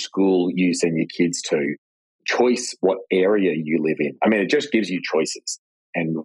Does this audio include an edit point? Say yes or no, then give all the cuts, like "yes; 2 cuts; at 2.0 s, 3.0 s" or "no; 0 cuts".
no; 0 cuts